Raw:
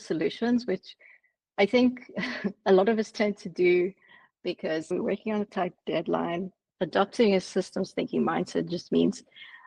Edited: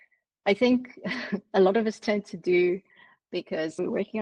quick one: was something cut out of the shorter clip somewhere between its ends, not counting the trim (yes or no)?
no